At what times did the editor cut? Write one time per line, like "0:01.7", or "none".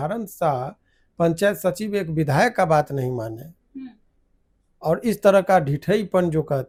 none